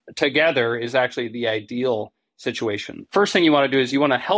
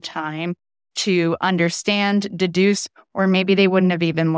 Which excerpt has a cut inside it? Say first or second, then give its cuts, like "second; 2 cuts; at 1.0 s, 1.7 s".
first; 1 cut; at 3.1 s